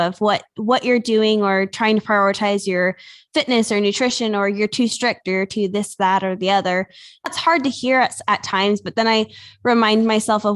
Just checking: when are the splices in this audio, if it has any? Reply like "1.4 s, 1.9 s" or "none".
7.3 s